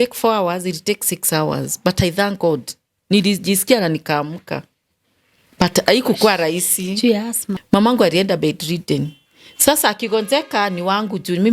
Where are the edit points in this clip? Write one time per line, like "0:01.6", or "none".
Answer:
0:07.5